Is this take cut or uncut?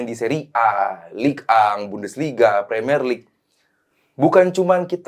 uncut